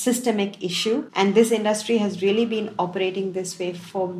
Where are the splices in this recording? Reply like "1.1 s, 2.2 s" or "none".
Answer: 1.1 s